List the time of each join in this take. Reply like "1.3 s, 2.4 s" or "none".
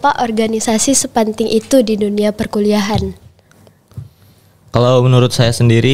none